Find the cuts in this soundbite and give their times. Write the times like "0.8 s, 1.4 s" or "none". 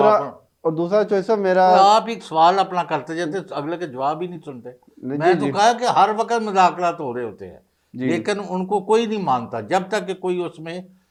none